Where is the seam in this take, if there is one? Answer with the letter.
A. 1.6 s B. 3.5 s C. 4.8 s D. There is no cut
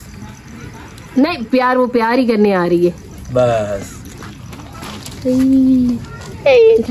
D